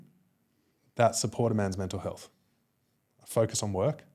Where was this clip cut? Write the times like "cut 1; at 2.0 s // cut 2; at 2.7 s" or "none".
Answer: none